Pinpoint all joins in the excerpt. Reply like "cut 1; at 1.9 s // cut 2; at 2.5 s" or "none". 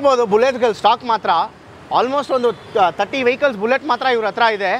none